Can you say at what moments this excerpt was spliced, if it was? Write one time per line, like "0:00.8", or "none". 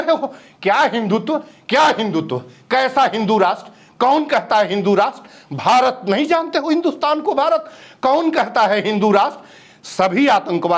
0:07.8